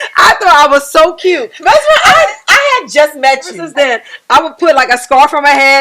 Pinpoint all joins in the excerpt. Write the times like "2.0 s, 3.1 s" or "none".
3.6 s